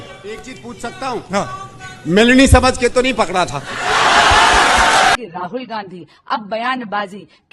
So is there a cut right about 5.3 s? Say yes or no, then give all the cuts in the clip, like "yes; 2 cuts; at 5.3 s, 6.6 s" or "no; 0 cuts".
yes; 1 cut; at 5.3 s